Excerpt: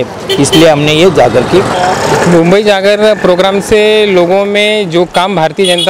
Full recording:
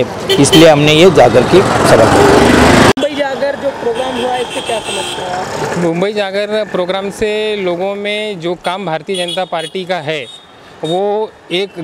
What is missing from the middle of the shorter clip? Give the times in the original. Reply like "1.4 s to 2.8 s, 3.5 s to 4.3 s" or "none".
1.7 s to 5.2 s